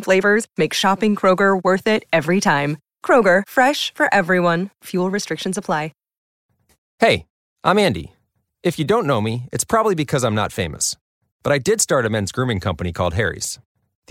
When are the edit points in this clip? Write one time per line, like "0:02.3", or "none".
0:06.2